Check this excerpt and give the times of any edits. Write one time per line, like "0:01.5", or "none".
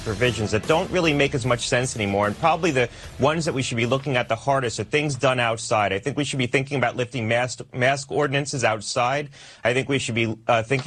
none

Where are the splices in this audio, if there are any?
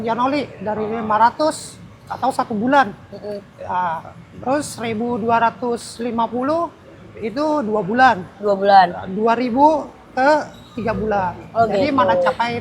none

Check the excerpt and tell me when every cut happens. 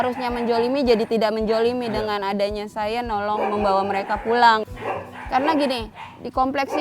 0:04.7

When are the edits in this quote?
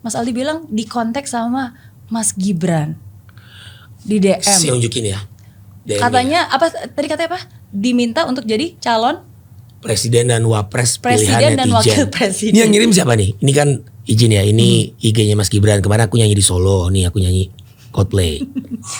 none

